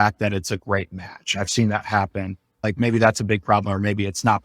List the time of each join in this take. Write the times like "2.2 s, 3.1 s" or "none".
2.6 s